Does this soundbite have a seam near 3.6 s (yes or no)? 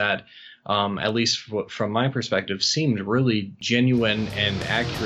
yes